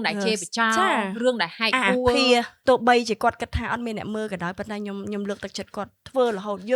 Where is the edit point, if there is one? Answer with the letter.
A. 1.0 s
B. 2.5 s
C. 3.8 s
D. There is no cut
B